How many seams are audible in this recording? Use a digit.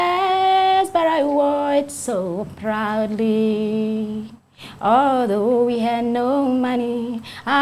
0